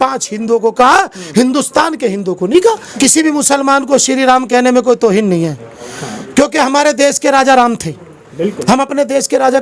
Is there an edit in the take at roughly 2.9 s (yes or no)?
yes